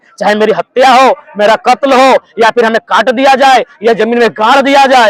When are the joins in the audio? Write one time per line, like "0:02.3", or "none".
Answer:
none

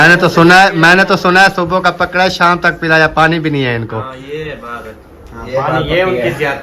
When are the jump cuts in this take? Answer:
none

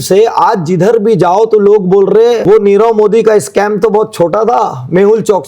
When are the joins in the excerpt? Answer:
0:02.4

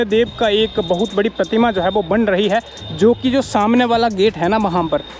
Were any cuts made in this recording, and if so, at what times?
none

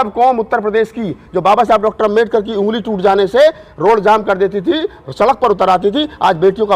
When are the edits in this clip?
none

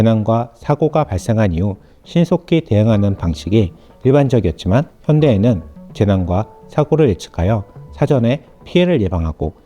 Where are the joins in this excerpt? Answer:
0:04.9

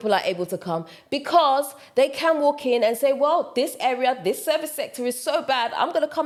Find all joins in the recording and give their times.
none

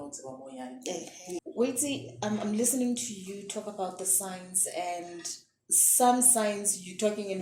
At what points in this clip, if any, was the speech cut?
0:01.4

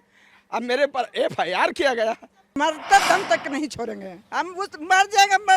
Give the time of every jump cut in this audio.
0:02.6

